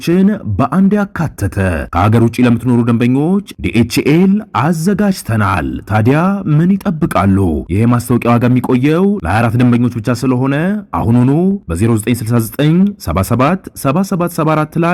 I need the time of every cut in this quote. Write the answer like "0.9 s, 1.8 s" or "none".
none